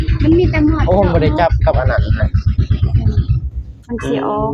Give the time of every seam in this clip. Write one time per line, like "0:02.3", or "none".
none